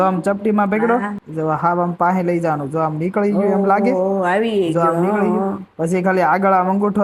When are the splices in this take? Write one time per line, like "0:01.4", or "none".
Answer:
0:01.2